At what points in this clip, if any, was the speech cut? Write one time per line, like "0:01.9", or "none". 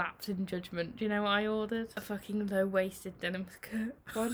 0:02.0